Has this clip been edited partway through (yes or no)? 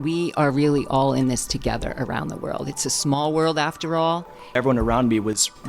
yes